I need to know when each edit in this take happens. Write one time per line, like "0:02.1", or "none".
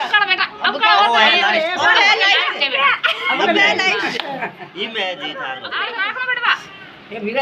0:05.5